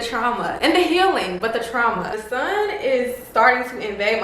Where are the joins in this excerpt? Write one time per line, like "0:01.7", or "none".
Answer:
0:02.1